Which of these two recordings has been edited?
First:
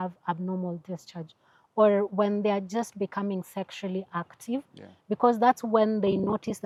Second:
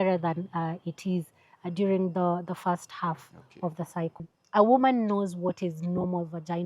second; 1 cut; at 4.3 s

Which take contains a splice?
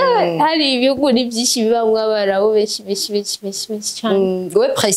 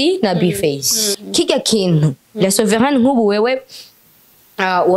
second; 1 cut; at 1.1 s

